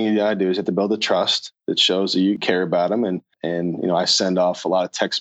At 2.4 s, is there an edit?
yes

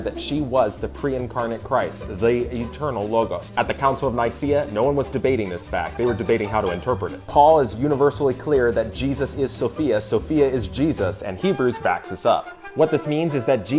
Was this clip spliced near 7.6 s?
yes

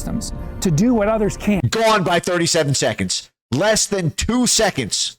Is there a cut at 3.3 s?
no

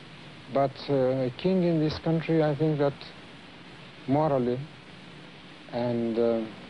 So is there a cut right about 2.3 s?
yes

